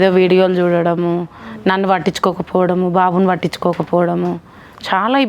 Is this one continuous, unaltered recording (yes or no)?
yes